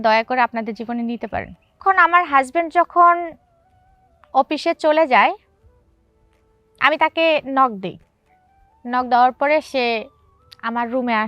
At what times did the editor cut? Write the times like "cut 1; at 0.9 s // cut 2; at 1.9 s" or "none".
cut 1; at 1.8 s